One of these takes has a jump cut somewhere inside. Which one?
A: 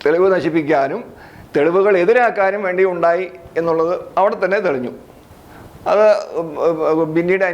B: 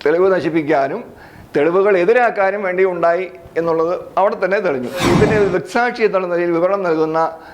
B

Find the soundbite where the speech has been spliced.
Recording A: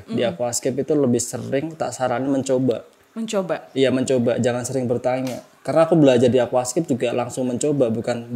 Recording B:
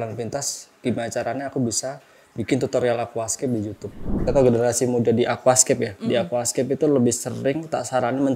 B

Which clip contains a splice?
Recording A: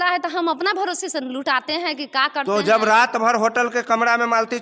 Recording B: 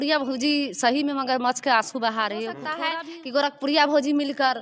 B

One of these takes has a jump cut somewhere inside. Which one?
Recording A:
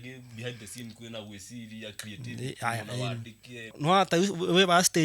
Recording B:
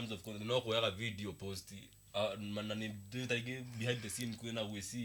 A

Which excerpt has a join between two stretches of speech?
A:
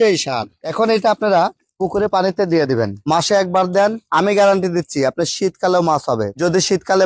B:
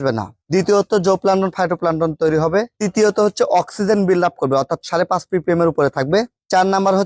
A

